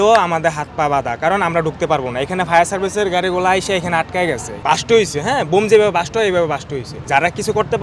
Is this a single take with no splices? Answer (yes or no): no